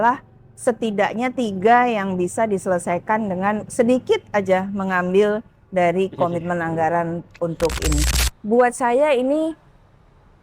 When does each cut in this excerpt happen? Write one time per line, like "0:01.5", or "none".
0:08.2